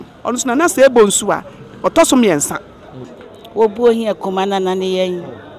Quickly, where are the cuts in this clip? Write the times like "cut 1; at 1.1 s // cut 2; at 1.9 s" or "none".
cut 1; at 3.0 s